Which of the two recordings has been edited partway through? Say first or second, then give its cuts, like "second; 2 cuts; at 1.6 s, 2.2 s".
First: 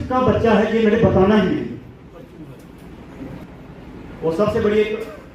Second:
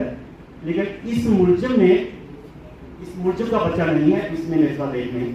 first; 1 cut; at 3.4 s